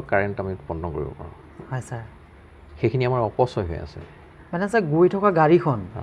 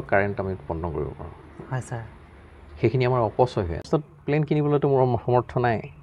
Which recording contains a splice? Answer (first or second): second